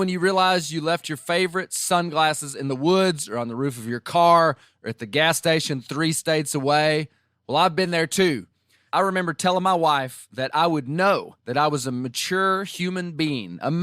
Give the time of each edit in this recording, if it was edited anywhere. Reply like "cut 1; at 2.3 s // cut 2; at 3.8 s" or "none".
cut 1; at 8.8 s